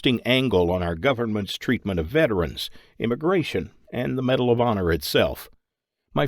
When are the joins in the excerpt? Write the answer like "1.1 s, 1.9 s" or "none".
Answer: 2.6 s